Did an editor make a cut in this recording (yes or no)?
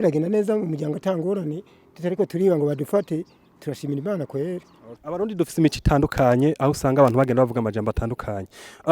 yes